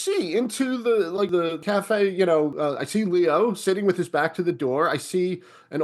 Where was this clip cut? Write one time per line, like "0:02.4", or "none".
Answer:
0:01.3
0:02.5